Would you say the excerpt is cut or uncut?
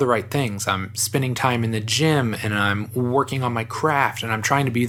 uncut